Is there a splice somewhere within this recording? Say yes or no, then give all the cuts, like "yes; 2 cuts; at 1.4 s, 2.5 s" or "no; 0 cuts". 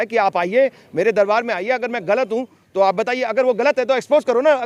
no; 0 cuts